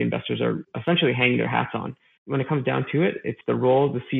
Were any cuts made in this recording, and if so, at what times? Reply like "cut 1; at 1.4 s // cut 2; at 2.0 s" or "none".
cut 1; at 2.3 s